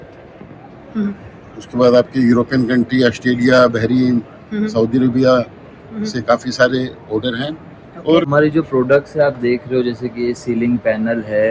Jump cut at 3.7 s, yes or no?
no